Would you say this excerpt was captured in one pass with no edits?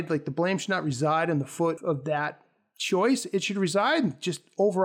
no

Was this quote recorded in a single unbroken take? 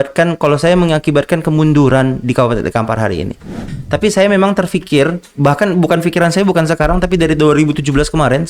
no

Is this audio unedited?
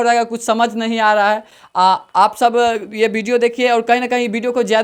yes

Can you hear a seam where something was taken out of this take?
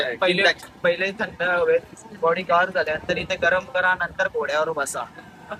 no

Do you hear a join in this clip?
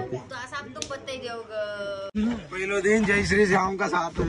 yes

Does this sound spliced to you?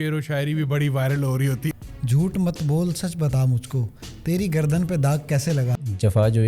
yes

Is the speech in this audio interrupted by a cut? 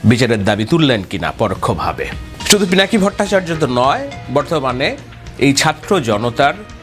yes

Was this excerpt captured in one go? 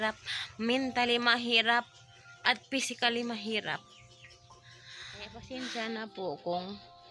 no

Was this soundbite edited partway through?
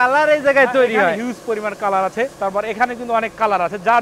yes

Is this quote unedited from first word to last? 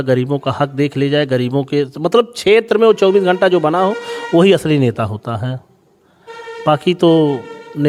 yes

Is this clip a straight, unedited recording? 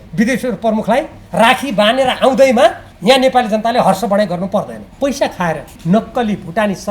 no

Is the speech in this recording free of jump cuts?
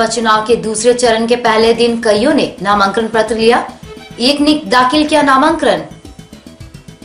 no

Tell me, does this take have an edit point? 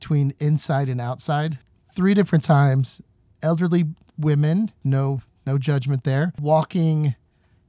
yes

